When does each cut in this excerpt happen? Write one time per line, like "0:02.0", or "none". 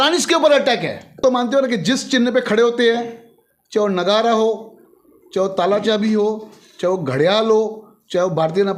0:01.2

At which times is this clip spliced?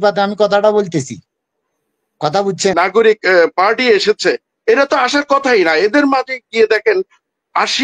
0:02.7

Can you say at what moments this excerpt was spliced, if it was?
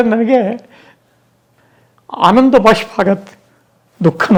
none

